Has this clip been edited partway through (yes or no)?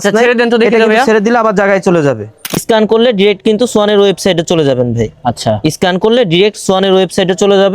yes